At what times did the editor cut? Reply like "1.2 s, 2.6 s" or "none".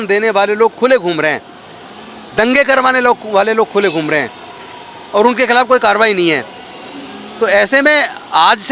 none